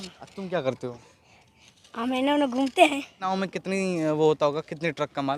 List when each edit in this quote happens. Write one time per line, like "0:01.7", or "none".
0:03.2